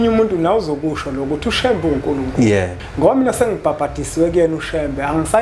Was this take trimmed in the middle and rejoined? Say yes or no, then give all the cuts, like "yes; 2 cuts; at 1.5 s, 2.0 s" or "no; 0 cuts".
yes; 1 cut; at 2.8 s